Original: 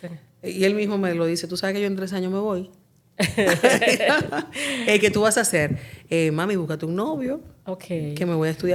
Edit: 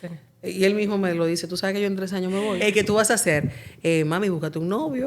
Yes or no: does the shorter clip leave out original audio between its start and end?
yes